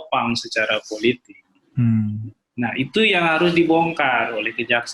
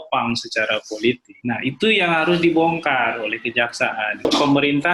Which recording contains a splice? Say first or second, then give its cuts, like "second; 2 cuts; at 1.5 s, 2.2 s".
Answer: second; 2 cuts; at 1.3 s, 4.2 s